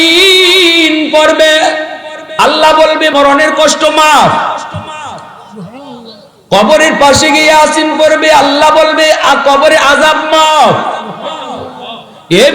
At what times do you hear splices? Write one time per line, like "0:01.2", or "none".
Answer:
0:03.1